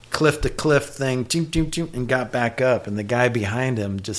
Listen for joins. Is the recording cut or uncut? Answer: uncut